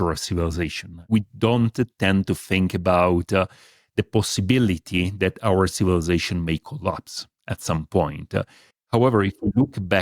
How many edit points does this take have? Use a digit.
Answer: 1